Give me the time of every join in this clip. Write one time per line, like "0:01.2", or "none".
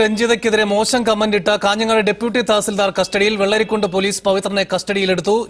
none